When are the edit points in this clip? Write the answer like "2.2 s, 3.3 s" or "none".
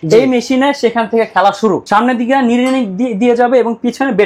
1.8 s